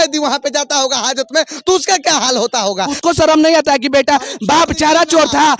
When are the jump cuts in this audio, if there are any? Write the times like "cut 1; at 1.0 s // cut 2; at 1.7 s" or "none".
cut 1; at 2.9 s